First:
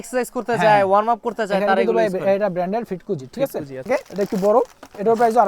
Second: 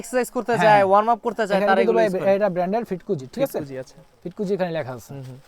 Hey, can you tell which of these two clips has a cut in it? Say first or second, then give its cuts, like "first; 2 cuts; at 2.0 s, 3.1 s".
first; 1 cut; at 3.9 s